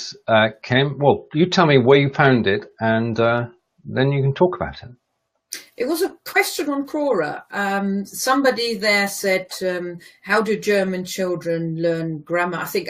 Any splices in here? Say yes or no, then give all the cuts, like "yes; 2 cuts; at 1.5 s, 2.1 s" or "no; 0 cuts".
yes; 1 cut; at 4.4 s